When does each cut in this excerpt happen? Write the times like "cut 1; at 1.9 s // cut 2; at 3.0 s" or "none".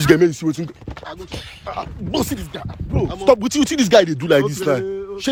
none